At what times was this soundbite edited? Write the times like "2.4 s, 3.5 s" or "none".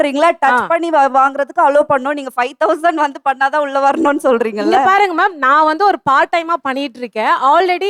none